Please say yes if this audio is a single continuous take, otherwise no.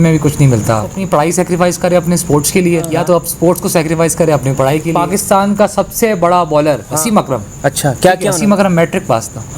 no